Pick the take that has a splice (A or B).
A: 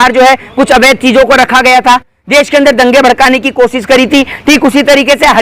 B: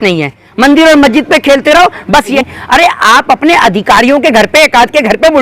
B